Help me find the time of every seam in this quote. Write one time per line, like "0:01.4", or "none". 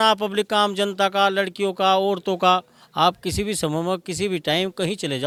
none